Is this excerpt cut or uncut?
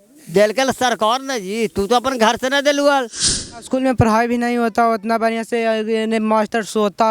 cut